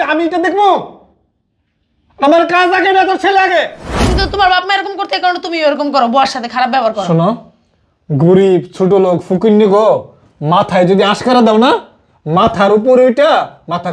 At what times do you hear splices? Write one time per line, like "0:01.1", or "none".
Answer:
0:03.9